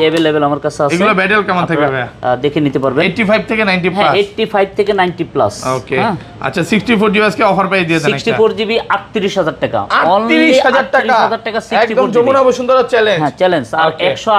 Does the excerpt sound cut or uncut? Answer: uncut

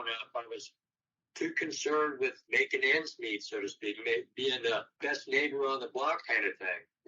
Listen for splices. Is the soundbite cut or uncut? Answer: cut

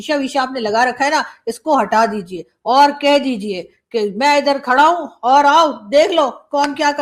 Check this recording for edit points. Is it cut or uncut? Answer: uncut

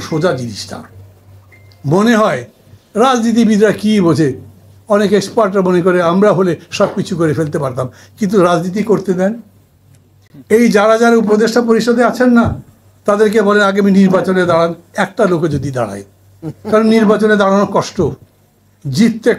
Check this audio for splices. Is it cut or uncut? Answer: uncut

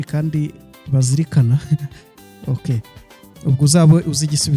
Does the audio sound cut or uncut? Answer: uncut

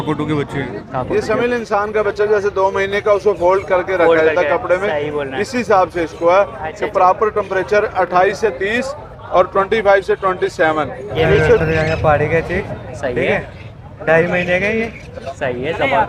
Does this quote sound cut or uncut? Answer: cut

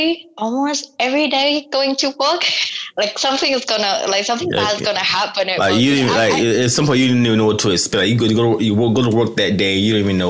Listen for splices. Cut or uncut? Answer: cut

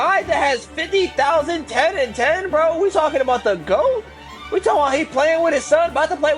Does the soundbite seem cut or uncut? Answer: uncut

